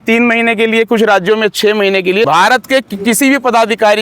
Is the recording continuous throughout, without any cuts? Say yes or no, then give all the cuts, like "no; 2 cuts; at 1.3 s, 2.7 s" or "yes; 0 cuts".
no; 1 cut; at 2.3 s